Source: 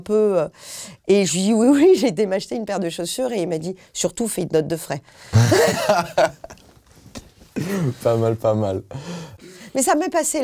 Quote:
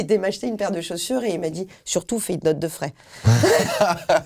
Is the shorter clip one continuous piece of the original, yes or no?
yes